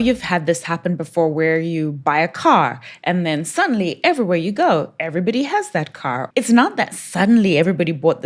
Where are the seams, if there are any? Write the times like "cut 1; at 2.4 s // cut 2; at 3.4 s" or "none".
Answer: cut 1; at 6.2 s